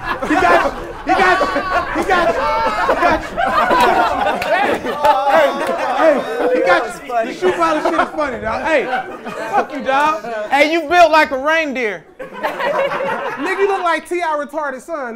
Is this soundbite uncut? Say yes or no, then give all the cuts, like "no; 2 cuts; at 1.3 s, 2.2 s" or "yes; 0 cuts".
yes; 0 cuts